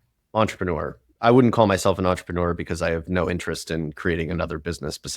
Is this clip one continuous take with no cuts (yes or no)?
no